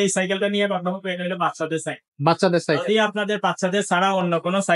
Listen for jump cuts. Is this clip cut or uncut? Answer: uncut